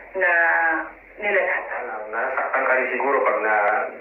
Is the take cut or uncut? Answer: cut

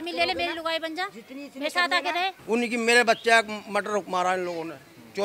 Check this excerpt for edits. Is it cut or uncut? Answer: cut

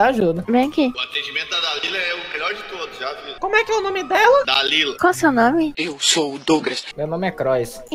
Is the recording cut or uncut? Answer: cut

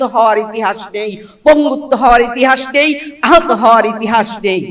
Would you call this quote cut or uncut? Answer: uncut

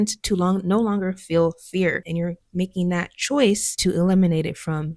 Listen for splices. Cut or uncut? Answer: cut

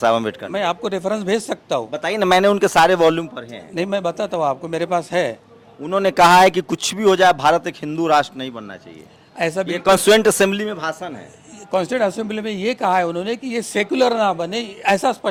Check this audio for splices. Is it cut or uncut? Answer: uncut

